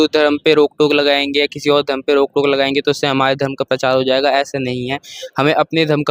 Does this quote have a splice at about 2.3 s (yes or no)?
no